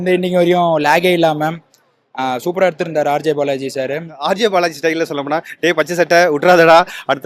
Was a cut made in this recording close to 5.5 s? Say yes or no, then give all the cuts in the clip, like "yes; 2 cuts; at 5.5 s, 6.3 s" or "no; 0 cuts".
no; 1 cut; at 4.2 s